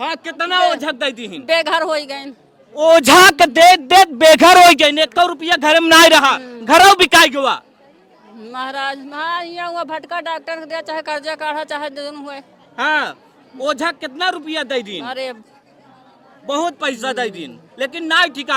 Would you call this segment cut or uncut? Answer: uncut